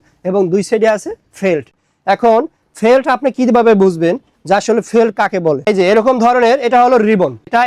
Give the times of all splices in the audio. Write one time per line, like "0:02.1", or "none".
none

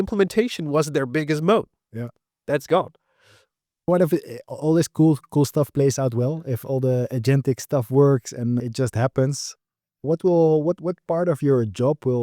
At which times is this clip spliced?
none

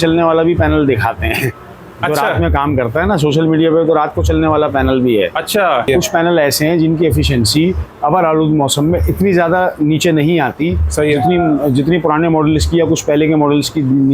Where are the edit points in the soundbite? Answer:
0:05.9

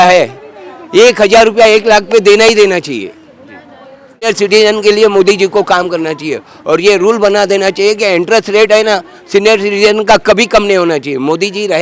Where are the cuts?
0:04.2

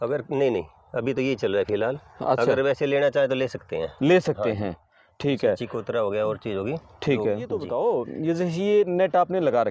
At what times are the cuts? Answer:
0:07.6

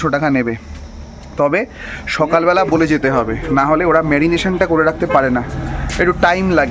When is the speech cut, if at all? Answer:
none

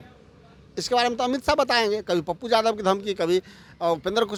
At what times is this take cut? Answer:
none

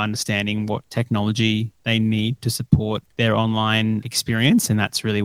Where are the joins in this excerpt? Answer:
0:00.9
0:01.7
0:03.1
0:04.1

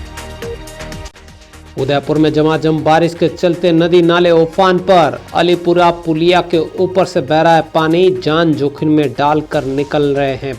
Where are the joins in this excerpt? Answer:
0:01.0

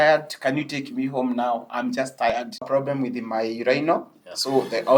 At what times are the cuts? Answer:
0:02.6

